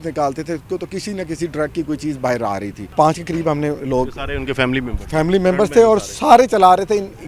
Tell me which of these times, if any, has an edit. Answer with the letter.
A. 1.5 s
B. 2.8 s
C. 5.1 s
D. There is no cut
B